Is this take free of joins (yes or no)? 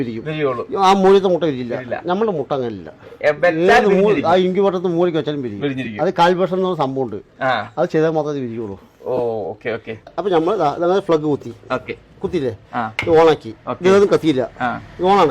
yes